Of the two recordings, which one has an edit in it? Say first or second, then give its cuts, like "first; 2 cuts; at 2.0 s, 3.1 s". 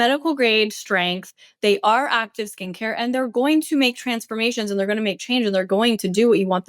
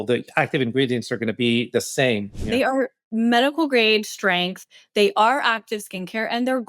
second; 1 cut; at 2.4 s